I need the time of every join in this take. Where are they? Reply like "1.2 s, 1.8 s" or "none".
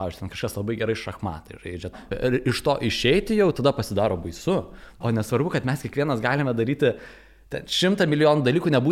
2.0 s, 5.0 s